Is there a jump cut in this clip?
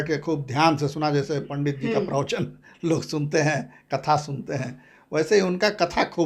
no; 0 cuts

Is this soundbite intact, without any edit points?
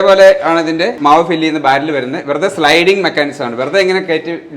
no; 1 cut; at 1.0 s

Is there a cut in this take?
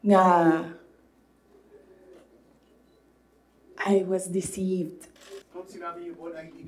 yes; 1 cut; at 5.5 s

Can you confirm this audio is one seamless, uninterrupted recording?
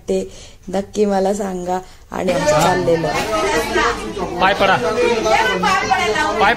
no; 1 cut; at 2.3 s

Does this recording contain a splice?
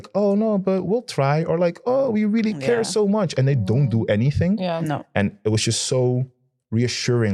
no; 0 cuts

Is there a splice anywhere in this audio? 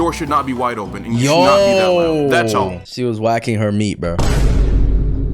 yes; 1 cut; at 2.9 s

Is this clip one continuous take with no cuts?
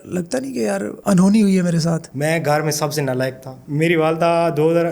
no; 2 cuts; at 2.1 s, 3.5 s

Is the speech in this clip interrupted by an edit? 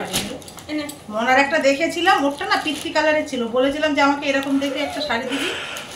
no; 0 cuts

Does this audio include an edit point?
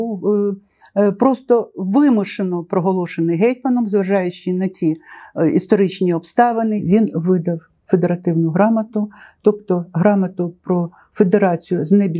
yes; 1 cut; at 6.8 s

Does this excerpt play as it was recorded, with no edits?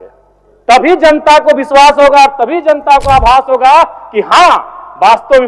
yes; 0 cuts

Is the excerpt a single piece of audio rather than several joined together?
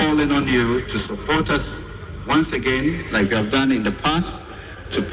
yes; 0 cuts

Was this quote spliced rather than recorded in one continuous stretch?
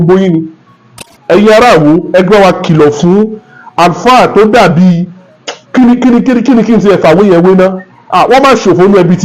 yes; 1 cut; at 1.1 s

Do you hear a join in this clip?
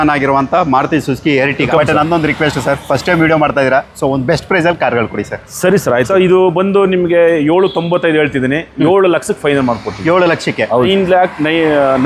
yes; 3 cuts; at 1.7 s, 6.1 s, 10.9 s

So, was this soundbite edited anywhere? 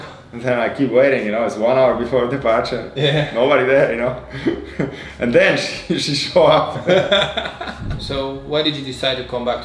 yes; 1 cut; at 7.9 s

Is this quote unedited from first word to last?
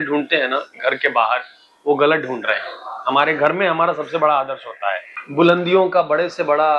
no; 1 cut; at 5.1 s

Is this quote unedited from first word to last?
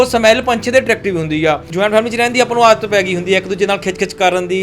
no; 1 cut; at 1.7 s

